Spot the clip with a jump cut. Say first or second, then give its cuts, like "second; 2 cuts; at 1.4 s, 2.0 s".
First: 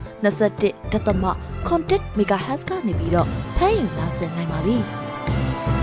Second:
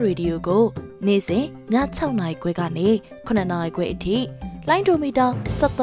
first; 1 cut; at 4.9 s